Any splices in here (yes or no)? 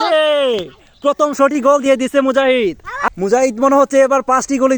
yes